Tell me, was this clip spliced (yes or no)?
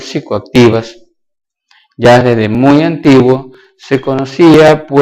yes